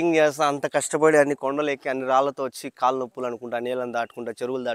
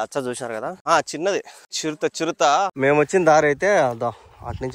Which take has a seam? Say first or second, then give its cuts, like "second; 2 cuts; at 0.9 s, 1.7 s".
second; 3 cuts; at 0.8 s, 1.6 s, 2.7 s